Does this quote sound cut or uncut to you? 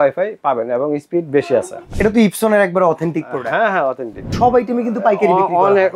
cut